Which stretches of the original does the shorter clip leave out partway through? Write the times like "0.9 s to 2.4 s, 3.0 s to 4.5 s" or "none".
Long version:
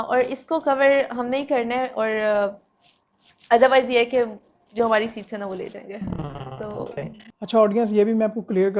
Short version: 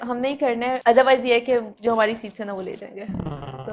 1.9 s to 3.4 s, 4.4 s to 4.6 s